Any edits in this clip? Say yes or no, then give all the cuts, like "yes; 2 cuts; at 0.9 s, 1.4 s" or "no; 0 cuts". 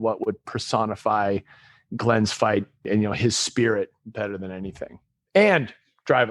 yes; 1 cut; at 2.9 s